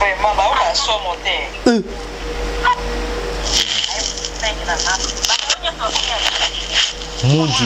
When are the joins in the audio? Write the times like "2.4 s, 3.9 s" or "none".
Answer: none